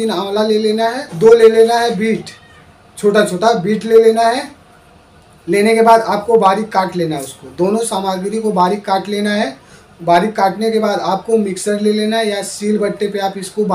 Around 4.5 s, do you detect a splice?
no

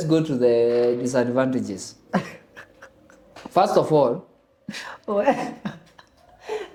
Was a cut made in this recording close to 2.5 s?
no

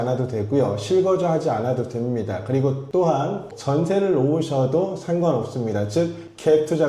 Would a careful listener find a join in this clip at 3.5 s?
yes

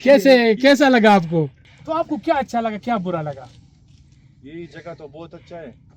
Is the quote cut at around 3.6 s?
no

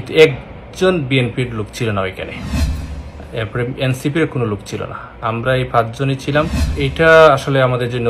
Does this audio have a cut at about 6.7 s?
yes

